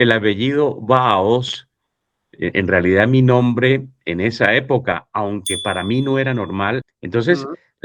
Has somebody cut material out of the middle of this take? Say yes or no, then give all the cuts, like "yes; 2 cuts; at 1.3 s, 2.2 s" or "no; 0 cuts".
yes; 1 cut; at 6.8 s